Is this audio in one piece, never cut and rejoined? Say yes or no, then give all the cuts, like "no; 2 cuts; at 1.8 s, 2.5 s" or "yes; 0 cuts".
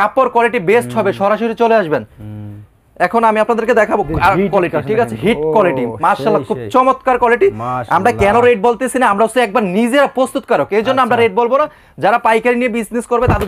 yes; 0 cuts